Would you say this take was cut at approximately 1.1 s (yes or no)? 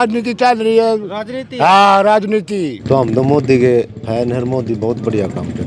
no